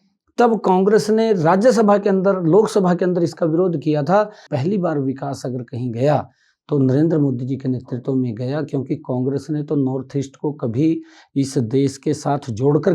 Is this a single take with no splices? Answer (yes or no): no